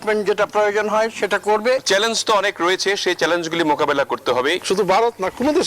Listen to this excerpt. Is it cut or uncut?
cut